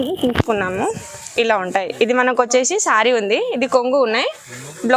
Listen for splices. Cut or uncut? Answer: uncut